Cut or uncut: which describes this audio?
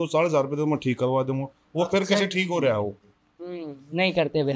uncut